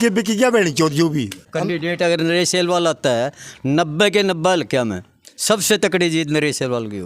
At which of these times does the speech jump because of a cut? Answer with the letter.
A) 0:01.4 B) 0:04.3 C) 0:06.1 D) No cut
A